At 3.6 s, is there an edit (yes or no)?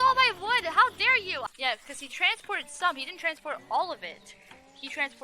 no